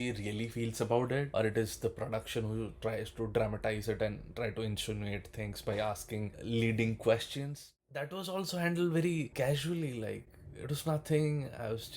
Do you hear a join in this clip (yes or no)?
yes